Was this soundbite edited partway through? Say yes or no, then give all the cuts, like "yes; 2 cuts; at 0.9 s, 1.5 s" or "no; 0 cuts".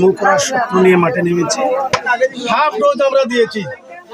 yes; 1 cut; at 2.1 s